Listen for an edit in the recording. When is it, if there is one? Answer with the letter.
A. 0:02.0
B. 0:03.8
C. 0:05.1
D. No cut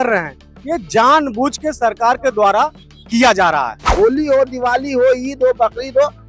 B